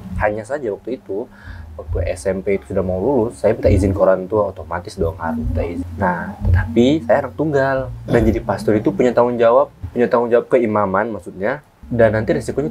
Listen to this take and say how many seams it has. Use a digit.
3